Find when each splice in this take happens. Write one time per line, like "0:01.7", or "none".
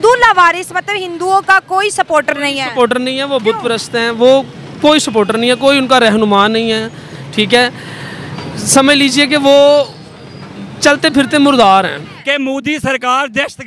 0:12.1